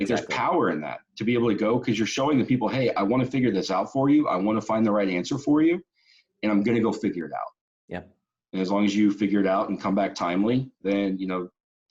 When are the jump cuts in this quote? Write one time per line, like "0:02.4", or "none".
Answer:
none